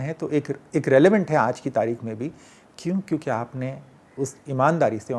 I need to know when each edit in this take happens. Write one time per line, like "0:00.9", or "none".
none